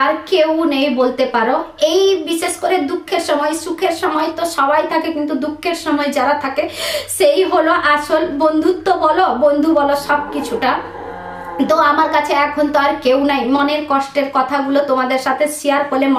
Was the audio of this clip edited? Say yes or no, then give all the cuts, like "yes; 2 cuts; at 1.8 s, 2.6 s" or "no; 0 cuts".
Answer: no; 0 cuts